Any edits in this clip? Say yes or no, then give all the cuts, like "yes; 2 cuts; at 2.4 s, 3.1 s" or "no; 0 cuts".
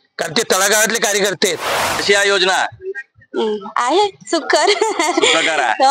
yes; 1 cut; at 2.0 s